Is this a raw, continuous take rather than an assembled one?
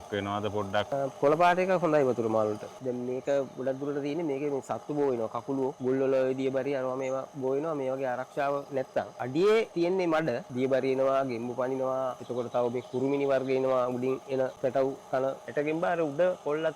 no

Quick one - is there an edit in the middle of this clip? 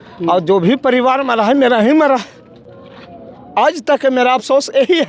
no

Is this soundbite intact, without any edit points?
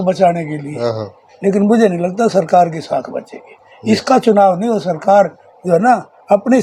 yes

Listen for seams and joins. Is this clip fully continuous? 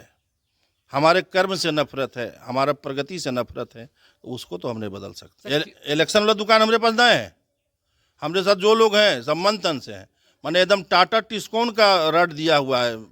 no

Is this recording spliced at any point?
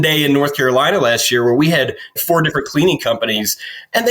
yes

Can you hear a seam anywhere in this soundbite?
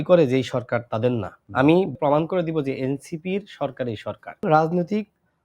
yes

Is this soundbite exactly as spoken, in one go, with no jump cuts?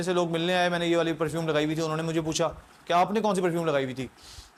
yes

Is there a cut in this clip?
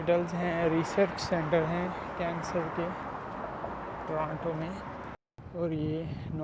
yes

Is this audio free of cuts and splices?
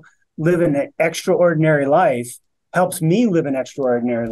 yes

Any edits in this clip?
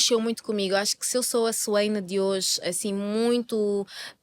no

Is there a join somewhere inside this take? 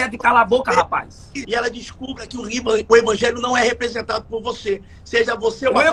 no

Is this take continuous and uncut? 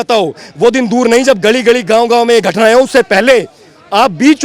yes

